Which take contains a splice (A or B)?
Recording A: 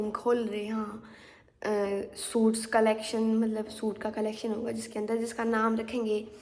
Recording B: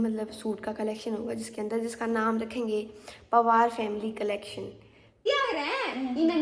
B